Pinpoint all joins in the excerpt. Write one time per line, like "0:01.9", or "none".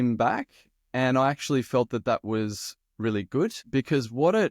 0:03.6